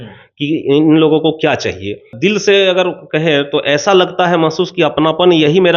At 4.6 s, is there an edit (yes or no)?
no